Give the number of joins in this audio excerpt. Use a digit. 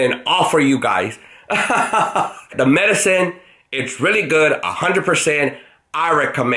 1